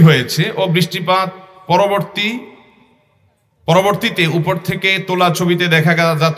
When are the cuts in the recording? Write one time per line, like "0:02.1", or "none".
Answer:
none